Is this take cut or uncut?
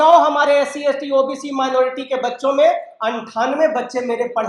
uncut